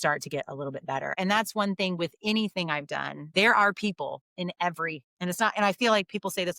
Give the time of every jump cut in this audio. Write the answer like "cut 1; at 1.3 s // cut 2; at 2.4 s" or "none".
cut 1; at 1.1 s // cut 2; at 3.2 s